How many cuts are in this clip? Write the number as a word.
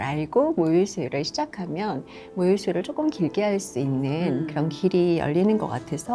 zero